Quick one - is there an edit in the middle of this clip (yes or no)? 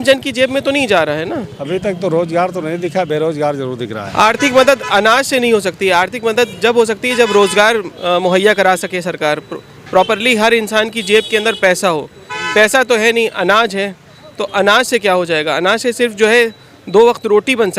yes